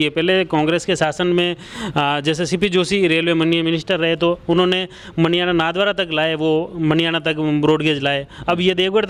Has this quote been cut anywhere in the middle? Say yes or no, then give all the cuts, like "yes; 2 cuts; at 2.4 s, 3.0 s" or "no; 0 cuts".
no; 0 cuts